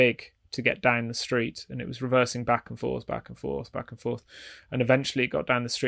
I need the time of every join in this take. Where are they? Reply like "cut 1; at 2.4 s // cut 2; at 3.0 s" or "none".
none